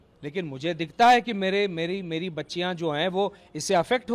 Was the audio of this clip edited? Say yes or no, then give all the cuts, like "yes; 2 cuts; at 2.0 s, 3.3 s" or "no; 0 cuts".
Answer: no; 0 cuts